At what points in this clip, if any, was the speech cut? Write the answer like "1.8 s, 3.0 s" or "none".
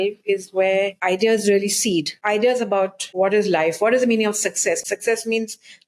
1.0 s, 2.1 s, 3.0 s, 4.8 s